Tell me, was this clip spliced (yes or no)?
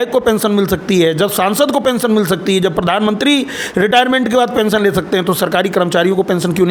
no